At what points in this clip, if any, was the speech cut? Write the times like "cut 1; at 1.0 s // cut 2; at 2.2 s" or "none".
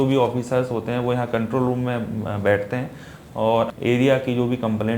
cut 1; at 3.7 s